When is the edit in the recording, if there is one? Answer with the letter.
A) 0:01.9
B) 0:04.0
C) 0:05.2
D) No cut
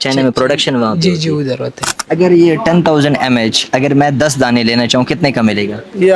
A